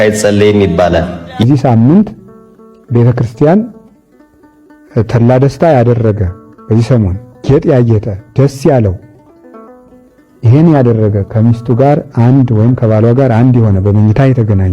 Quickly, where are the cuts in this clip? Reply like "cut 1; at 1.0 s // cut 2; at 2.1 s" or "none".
cut 1; at 1.3 s